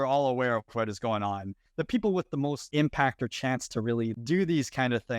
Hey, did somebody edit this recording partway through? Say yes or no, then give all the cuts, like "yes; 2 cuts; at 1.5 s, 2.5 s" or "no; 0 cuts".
yes; 3 cuts; at 1.6 s, 2.7 s, 4.1 s